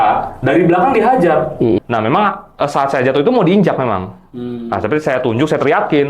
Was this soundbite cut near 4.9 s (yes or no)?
no